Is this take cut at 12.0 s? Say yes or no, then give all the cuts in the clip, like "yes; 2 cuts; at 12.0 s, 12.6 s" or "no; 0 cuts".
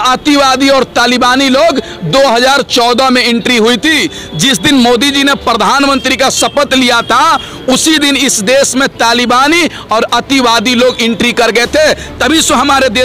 no; 0 cuts